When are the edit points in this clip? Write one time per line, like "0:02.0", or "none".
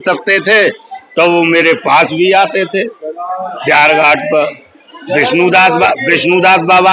none